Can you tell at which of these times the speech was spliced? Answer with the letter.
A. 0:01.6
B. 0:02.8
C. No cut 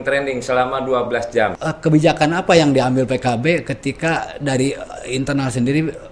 A